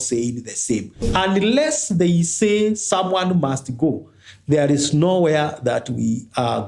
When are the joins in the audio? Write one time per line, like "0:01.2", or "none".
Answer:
0:01.0